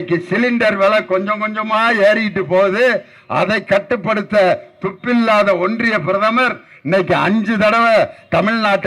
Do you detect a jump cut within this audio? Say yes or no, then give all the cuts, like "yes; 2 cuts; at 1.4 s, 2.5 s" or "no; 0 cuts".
no; 0 cuts